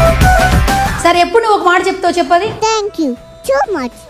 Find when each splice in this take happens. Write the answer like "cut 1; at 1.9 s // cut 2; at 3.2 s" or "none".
cut 1; at 0.9 s